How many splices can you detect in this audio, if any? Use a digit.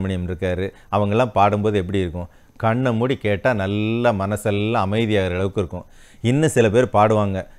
0